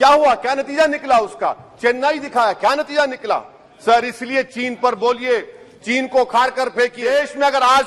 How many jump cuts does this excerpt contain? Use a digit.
1